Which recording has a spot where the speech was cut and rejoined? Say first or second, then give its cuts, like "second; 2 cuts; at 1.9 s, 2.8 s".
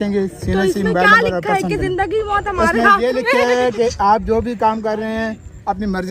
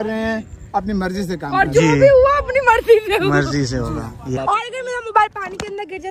second; 1 cut; at 4.4 s